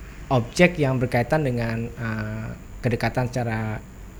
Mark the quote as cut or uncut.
uncut